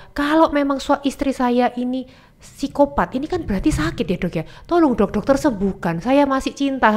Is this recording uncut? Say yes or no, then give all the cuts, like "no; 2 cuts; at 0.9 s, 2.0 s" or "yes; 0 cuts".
yes; 0 cuts